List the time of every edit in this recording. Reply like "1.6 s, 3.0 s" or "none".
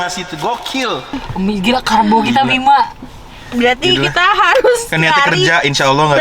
1.1 s